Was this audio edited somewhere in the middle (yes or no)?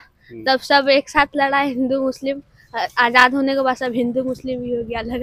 no